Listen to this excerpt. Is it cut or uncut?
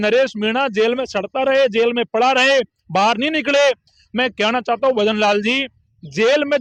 uncut